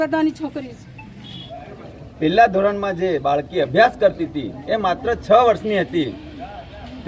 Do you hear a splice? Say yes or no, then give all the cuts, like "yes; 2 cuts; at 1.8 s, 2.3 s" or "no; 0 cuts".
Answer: yes; 1 cut; at 1.4 s